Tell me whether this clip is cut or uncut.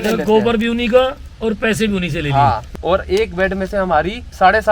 cut